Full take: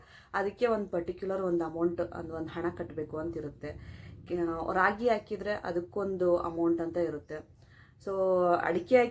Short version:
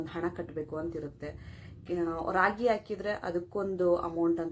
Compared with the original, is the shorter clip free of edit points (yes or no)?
yes